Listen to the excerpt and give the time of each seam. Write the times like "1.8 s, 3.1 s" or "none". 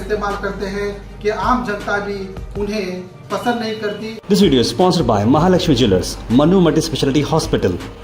4.1 s